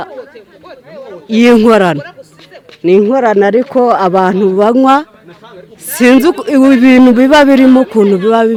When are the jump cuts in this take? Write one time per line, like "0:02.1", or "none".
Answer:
none